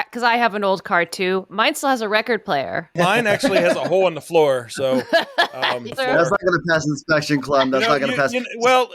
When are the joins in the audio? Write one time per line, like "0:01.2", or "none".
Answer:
0:02.9
0:05.9